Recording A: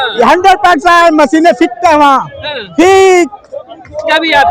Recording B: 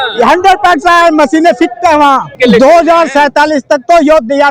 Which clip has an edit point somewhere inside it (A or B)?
B